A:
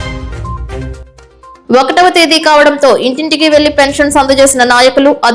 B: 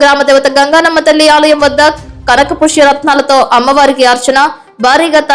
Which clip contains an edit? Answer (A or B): A